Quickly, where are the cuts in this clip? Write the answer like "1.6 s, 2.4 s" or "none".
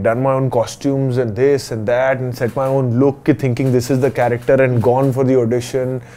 none